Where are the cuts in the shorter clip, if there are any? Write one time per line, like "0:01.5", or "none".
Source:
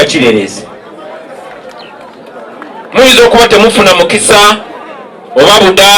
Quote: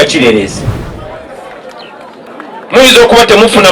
0:02.3